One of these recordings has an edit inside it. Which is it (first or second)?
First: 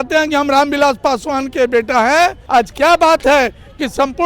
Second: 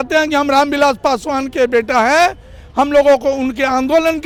first